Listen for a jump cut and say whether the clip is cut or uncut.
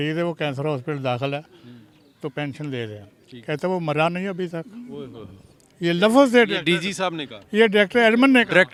uncut